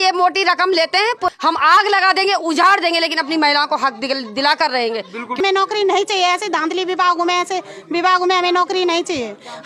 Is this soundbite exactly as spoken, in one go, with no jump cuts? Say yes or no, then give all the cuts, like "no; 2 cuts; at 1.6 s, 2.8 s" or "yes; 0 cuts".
no; 2 cuts; at 1.3 s, 5.4 s